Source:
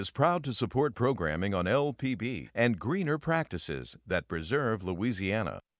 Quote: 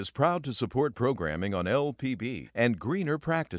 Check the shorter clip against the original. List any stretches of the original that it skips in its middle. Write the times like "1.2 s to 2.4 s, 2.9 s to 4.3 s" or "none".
none